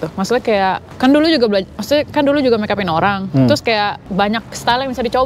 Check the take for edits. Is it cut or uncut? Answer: cut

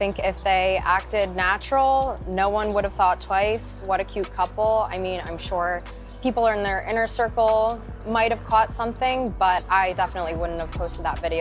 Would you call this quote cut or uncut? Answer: uncut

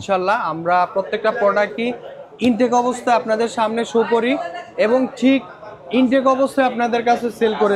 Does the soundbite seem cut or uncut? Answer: uncut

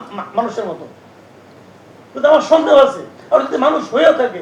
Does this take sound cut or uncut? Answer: uncut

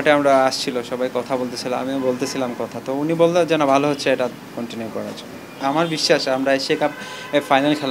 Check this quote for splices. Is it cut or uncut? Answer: uncut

